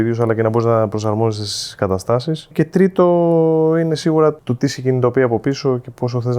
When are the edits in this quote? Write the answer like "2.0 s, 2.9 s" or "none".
2.5 s, 4.5 s